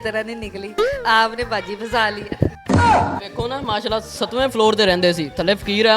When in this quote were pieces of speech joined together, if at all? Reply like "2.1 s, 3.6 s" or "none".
2.6 s, 3.3 s